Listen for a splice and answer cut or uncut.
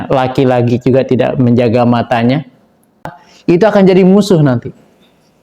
cut